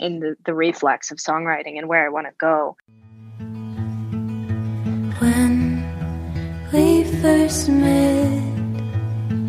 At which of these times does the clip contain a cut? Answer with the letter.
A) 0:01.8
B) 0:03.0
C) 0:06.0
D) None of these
B